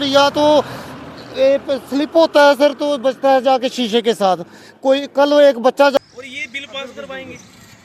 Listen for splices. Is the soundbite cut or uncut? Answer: cut